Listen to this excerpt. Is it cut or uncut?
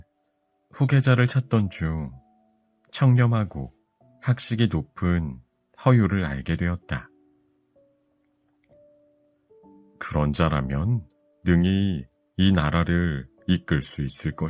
uncut